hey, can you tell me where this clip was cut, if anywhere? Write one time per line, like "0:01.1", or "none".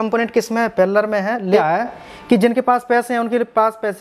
0:01.6